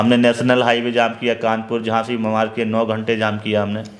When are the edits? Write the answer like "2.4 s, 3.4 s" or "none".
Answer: none